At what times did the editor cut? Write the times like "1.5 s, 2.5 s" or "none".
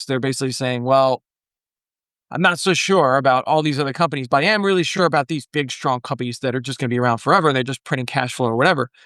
none